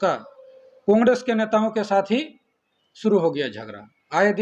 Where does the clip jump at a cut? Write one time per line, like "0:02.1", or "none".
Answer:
none